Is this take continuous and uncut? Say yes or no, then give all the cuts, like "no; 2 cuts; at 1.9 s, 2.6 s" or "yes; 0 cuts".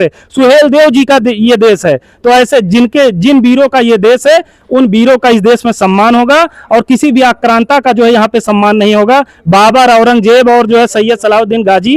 yes; 0 cuts